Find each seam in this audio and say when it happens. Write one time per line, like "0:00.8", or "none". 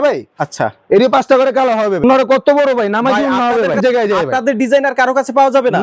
0:02.0
0:03.8